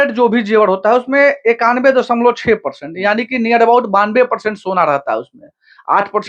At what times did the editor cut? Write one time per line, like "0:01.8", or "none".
none